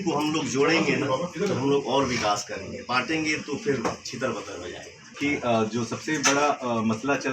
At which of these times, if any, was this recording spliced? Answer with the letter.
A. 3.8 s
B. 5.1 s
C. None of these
B